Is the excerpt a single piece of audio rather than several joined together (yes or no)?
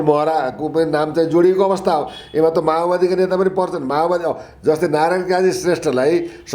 yes